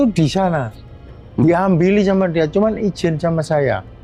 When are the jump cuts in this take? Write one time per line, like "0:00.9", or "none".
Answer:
none